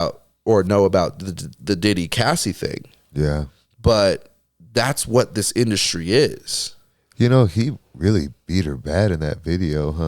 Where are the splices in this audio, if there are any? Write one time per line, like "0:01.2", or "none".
none